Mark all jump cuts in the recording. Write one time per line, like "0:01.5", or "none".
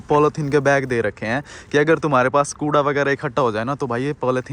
none